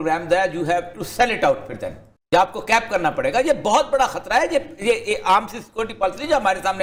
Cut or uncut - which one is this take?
uncut